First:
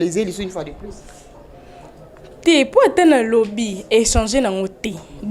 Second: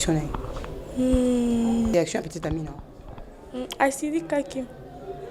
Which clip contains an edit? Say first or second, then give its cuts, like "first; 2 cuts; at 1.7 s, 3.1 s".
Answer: second; 1 cut; at 1.9 s